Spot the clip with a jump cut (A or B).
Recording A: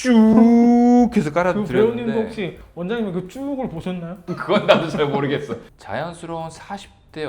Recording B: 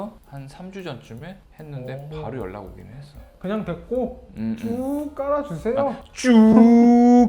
A